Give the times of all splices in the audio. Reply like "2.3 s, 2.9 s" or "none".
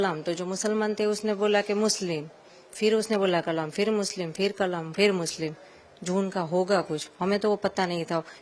none